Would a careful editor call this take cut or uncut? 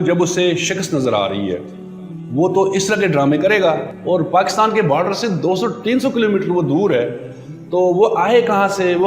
cut